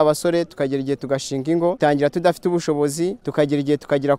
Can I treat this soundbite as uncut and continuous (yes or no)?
no